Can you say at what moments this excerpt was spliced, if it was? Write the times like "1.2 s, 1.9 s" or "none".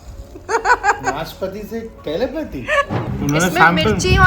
3.1 s